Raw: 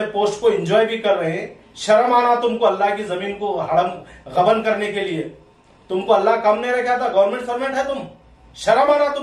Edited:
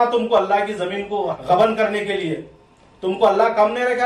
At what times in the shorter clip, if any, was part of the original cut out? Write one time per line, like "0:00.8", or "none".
0:01.3